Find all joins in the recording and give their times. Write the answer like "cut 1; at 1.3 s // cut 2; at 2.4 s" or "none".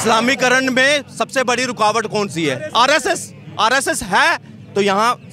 none